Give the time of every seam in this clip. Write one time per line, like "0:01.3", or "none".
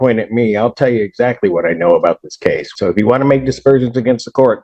0:02.7